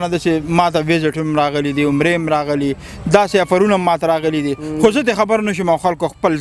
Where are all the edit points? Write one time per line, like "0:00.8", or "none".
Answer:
none

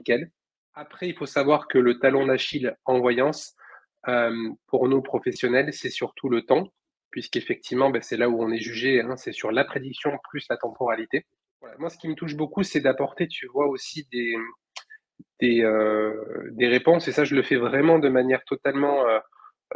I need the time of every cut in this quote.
0:00.9
0:12.0

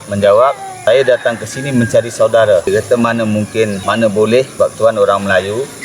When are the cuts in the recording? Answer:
0:00.8
0:02.7
0:03.8
0:04.5

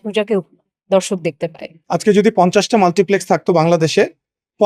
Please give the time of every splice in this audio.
0:01.7

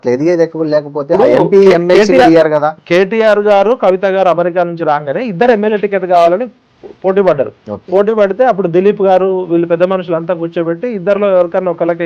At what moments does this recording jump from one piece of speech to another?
none

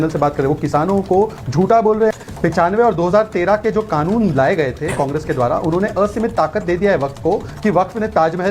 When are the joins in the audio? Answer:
0:02.1

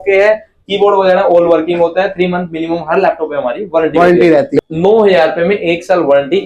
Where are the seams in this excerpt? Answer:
0:04.6

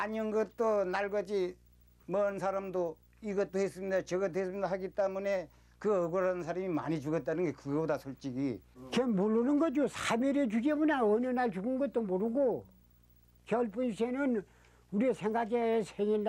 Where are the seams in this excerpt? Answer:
0:08.7

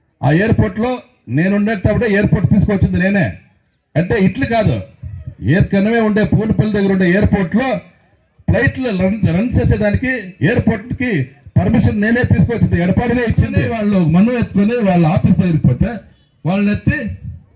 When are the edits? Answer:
0:13.7

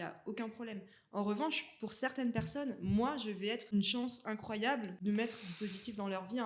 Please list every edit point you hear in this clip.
0:03.7
0:04.9

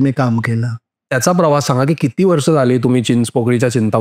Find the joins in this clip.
0:01.0

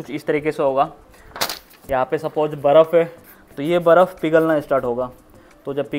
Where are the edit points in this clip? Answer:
none

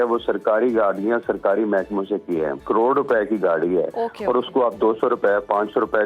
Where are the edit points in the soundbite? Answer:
0:02.6

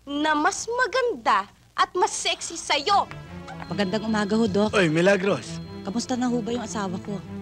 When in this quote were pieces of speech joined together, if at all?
0:03.3

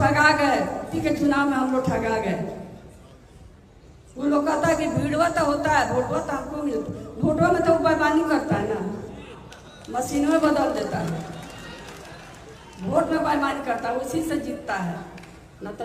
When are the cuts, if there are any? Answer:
0:01.0

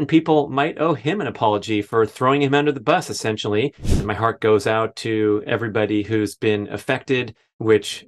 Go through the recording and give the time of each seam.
0:04.0

